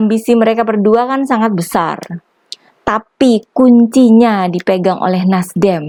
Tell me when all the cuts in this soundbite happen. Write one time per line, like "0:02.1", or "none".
none